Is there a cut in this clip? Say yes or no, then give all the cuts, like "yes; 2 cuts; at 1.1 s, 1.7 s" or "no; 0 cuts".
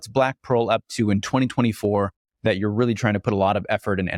no; 0 cuts